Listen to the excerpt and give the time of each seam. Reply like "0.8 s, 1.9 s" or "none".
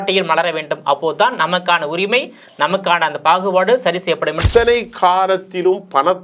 4.4 s